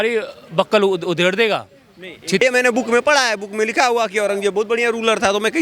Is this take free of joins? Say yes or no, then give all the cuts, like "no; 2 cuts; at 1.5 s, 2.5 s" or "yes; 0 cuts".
no; 1 cut; at 2.4 s